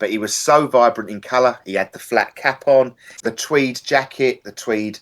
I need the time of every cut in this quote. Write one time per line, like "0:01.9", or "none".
0:03.0